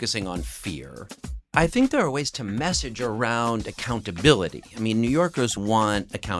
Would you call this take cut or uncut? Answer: cut